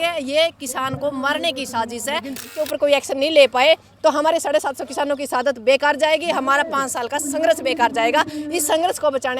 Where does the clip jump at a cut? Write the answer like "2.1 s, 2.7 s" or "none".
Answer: 2.6 s